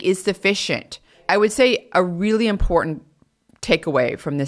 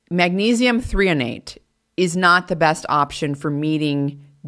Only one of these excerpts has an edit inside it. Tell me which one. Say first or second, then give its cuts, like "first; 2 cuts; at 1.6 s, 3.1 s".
first; 1 cut; at 1.1 s